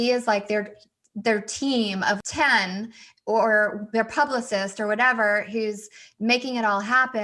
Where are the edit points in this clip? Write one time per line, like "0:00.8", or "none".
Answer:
0:02.2